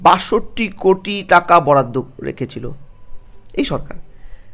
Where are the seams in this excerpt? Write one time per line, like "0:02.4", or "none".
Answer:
none